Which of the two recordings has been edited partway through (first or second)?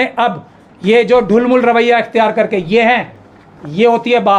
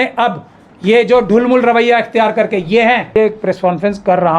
second